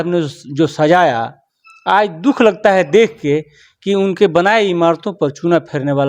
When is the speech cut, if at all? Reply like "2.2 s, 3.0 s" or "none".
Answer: none

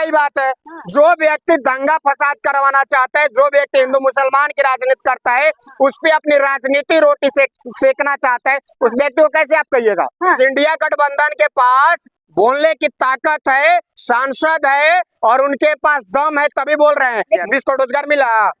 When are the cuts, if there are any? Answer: 10.4 s, 17.4 s

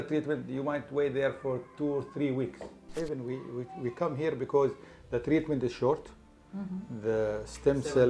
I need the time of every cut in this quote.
2.9 s

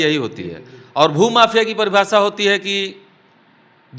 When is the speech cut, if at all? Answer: none

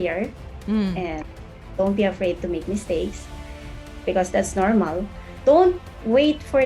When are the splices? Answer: 5.3 s

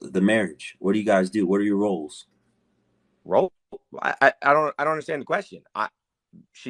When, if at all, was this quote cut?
5.1 s

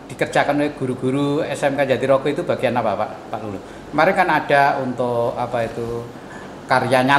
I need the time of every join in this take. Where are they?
none

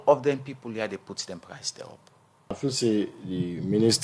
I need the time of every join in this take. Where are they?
2.6 s

